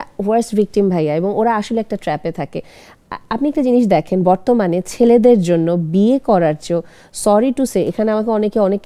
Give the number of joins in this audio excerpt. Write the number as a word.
zero